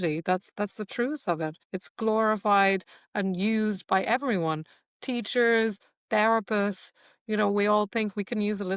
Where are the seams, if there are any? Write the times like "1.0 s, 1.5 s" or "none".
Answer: 1.7 s

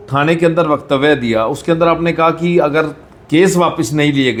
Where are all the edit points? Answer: none

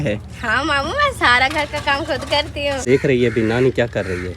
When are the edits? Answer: 2.8 s

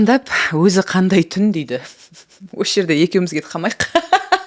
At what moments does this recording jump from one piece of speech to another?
none

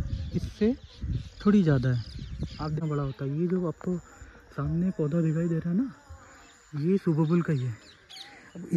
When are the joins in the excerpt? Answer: 2.7 s

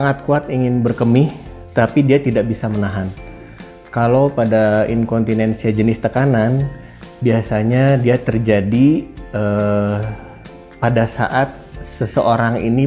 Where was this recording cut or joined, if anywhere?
none

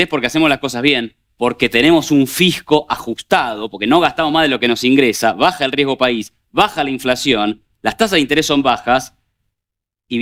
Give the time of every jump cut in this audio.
none

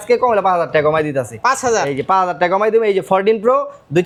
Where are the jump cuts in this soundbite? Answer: none

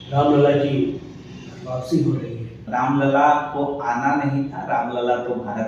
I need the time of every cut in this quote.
2.6 s

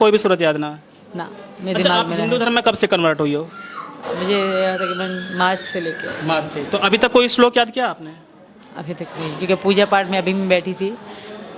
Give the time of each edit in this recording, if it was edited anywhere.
none

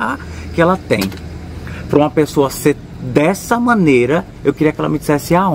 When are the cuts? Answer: none

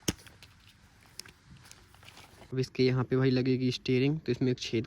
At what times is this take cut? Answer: 2.5 s

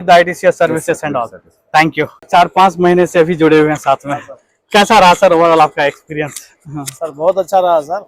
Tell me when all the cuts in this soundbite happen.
2.3 s

